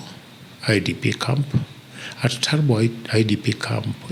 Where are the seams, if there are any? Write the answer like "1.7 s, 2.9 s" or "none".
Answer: none